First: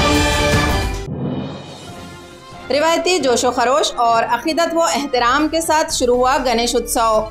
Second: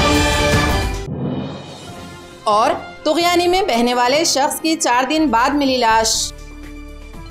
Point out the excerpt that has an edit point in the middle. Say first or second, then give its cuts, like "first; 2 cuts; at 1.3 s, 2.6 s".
first; 1 cut; at 2.2 s